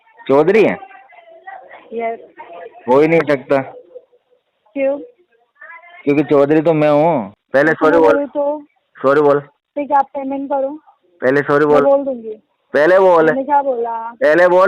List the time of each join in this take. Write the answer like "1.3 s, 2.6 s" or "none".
7.4 s